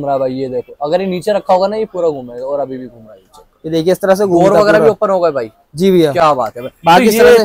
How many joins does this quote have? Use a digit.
0